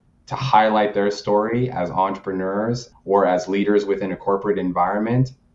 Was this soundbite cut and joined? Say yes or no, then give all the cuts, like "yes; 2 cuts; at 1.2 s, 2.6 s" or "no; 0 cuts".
no; 0 cuts